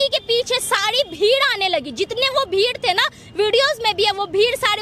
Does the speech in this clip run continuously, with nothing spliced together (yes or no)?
yes